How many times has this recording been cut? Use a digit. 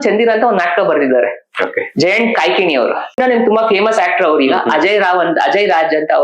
1